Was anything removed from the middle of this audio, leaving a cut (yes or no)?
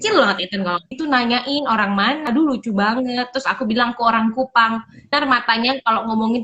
yes